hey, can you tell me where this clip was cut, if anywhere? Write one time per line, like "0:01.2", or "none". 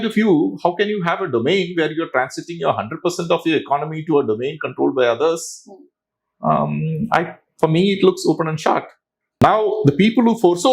0:09.4